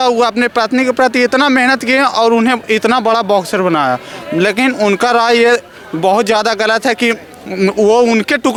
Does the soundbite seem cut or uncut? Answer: uncut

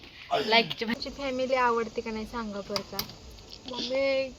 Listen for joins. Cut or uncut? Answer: cut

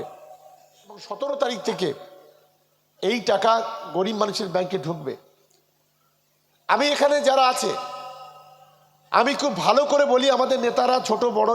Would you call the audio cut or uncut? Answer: cut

